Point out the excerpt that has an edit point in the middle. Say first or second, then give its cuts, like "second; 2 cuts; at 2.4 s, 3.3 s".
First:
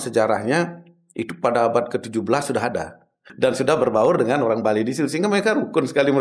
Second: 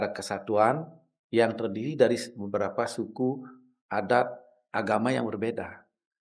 first; 1 cut; at 3.2 s